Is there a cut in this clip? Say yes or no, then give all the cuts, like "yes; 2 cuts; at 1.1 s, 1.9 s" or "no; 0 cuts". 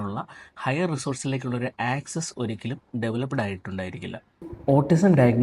yes; 1 cut; at 4.5 s